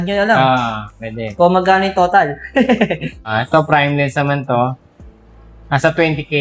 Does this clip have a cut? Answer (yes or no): yes